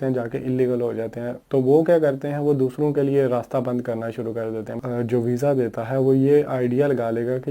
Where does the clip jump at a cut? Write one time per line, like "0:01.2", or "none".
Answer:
0:01.3
0:04.8